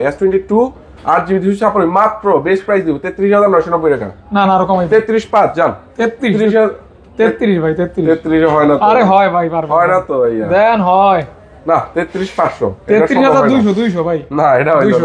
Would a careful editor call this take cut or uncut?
uncut